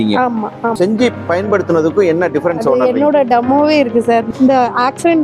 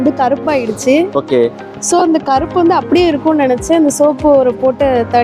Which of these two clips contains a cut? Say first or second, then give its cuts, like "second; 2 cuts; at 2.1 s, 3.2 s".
first; 2 cuts; at 0.7 s, 4.3 s